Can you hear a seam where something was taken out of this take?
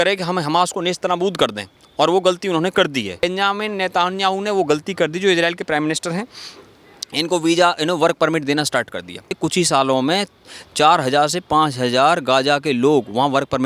yes; 2 cuts; at 3.2 s, 9.4 s

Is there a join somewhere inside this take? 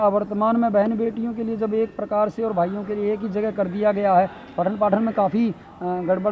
no; 0 cuts

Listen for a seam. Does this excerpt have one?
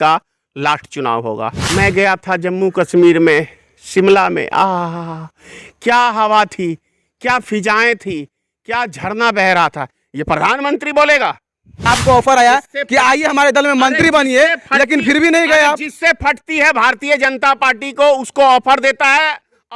yes; 2 cuts; at 1.6 s, 11.8 s

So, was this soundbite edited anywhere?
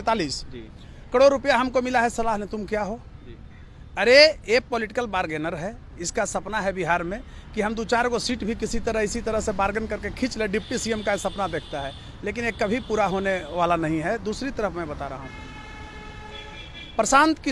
no; 0 cuts

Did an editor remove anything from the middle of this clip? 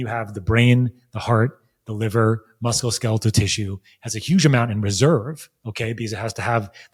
no; 0 cuts

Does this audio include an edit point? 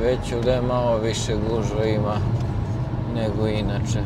no; 0 cuts

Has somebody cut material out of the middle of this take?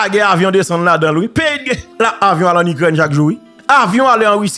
yes; 2 cuts; at 1.8 s, 3.5 s

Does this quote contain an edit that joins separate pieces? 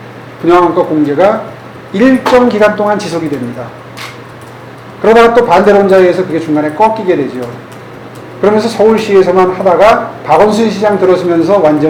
no; 0 cuts

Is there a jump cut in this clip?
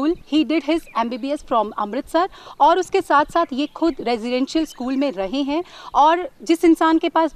no; 0 cuts

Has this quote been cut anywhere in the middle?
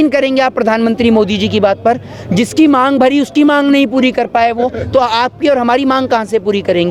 no; 0 cuts

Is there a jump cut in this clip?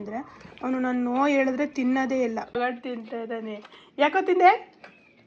yes; 1 cut; at 2.5 s

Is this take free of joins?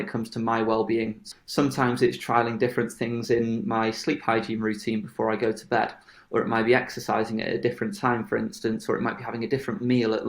no; 1 cut; at 1.2 s

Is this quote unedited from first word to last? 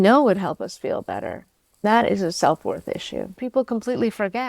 no; 1 cut; at 3.3 s

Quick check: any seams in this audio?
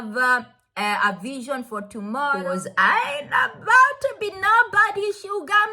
yes; 1 cut; at 2.4 s

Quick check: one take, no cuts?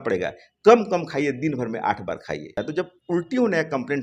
no; 1 cut; at 2.6 s

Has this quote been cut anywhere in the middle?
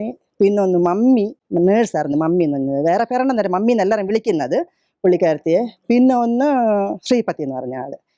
yes; 1 cut; at 1.4 s

